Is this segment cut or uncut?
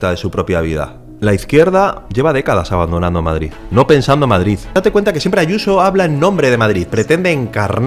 cut